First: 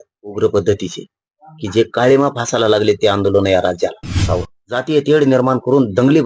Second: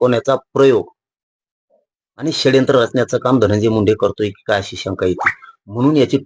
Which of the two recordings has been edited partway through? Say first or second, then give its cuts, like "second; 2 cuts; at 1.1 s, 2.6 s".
first; 1 cut; at 4.2 s